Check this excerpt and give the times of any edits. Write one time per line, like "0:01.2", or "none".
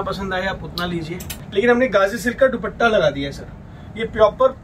0:01.4